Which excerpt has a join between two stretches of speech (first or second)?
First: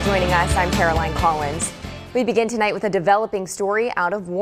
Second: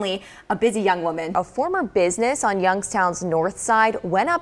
second